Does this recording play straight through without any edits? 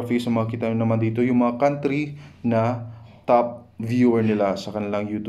yes; 0 cuts

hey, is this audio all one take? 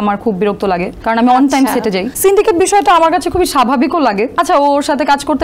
no; 3 cuts; at 0.9 s, 2.1 s, 4.3 s

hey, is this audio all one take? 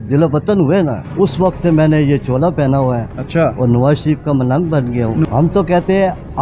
no; 2 cuts; at 1.0 s, 5.2 s

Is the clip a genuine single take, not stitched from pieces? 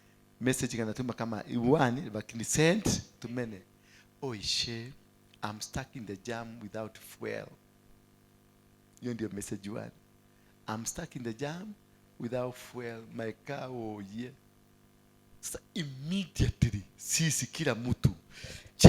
yes; 0 cuts

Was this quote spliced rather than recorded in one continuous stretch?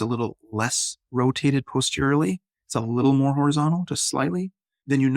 no; 0 cuts

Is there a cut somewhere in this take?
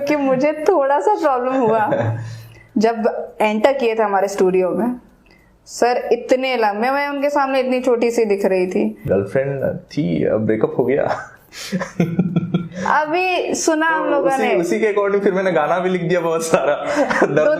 yes; 1 cut; at 9.0 s

